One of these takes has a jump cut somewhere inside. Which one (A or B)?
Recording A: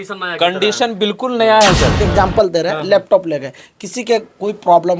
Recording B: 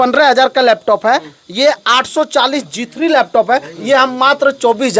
A